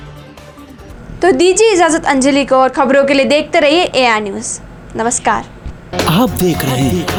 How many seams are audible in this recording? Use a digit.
0